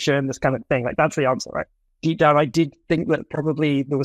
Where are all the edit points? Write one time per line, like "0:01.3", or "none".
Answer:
0:01.8